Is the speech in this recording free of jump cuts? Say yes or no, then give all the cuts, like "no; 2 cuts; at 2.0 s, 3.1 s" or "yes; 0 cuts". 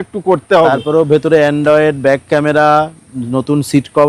yes; 0 cuts